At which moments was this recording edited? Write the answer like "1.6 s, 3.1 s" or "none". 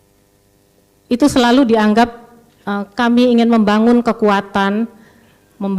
none